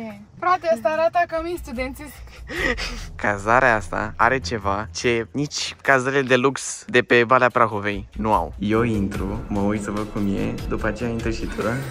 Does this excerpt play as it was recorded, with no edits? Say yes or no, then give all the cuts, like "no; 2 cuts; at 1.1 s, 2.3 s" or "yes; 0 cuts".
no; 2 cuts; at 3.1 s, 8.5 s